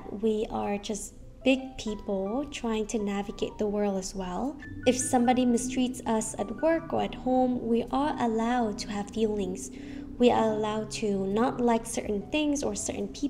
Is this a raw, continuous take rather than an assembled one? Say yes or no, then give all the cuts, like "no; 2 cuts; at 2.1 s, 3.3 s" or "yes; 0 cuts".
yes; 0 cuts